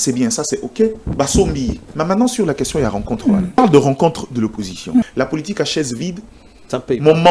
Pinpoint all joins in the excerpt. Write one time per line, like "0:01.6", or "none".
0:01.9
0:03.6
0:05.0